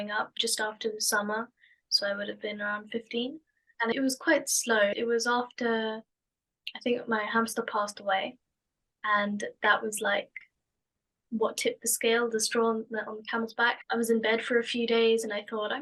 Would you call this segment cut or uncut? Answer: uncut